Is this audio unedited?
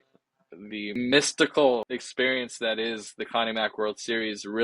no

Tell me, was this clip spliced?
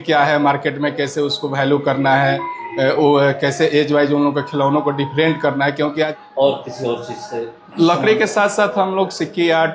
yes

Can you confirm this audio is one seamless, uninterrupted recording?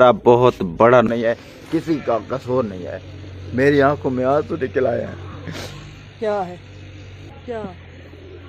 no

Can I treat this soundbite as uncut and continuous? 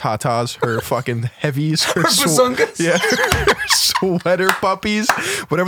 yes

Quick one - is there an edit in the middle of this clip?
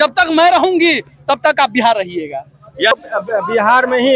yes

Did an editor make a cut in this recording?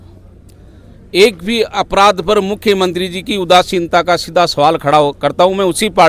no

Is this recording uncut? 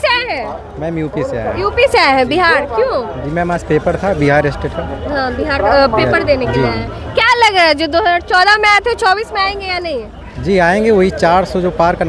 yes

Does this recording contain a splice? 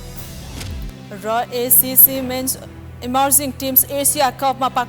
no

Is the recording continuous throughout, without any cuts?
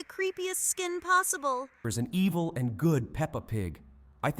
no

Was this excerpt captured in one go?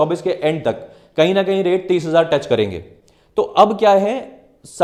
yes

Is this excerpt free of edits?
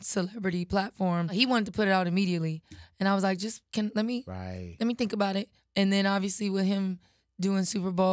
no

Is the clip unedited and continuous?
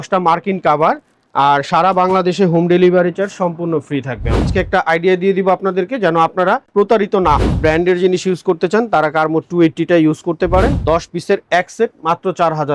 no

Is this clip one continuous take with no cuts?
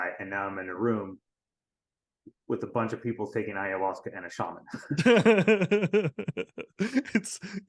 yes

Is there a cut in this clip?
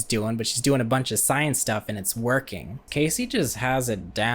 yes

